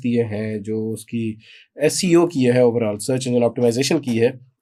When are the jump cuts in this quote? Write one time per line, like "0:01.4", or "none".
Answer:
none